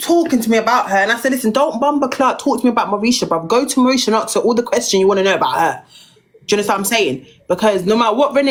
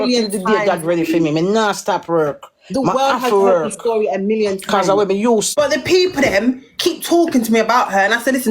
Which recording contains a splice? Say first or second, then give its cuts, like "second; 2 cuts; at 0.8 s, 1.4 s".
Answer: second; 1 cut; at 5.5 s